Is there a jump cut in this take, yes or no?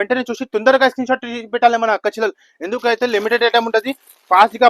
no